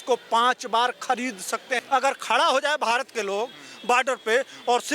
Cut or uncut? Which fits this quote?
cut